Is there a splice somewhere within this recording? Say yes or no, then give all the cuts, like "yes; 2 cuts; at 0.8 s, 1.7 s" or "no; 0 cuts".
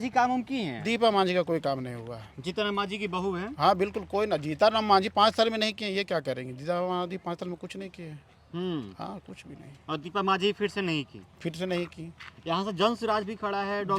no; 0 cuts